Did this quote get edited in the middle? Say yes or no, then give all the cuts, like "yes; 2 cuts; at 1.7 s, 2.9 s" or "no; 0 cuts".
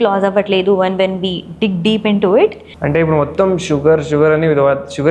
yes; 1 cut; at 2.7 s